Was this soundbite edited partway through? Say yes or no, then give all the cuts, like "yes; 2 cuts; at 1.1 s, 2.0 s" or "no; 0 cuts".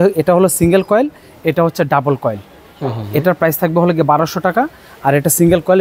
no; 0 cuts